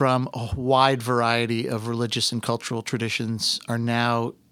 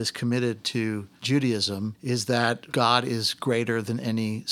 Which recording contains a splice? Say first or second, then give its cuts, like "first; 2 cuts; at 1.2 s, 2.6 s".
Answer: second; 3 cuts; at 1.1 s, 2.0 s, 2.6 s